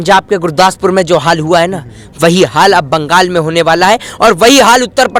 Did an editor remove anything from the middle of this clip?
no; 0 cuts

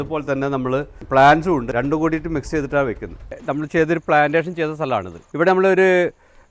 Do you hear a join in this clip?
yes; 4 cuts; at 1.0 s, 1.7 s, 3.3 s, 5.2 s

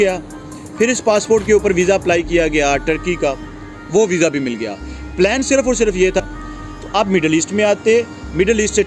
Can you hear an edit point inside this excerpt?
yes; 1 cut; at 6.2 s

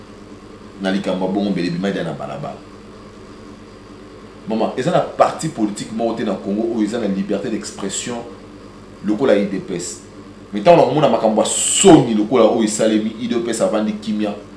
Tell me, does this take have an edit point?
no; 0 cuts

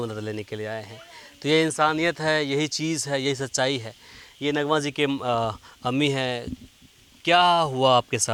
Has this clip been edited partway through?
no; 0 cuts

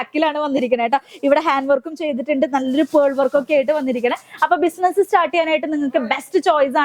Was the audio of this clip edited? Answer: no; 0 cuts

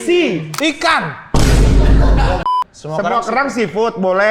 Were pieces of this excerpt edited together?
yes; 1 cut; at 2.4 s

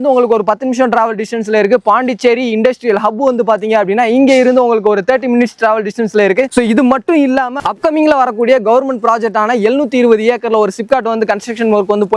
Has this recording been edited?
no; 0 cuts

